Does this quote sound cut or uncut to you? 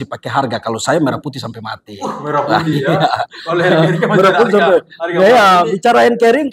uncut